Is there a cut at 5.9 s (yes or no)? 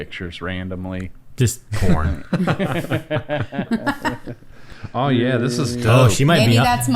yes